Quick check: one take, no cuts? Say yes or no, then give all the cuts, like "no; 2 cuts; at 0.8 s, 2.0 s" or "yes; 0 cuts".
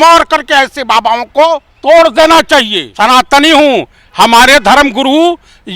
no; 2 cuts; at 1.7 s, 2.8 s